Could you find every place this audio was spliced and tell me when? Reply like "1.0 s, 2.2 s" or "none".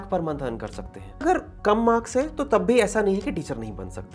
1.2 s